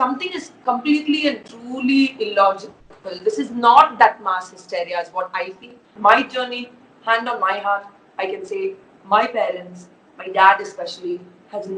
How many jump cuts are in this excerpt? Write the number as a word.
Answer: one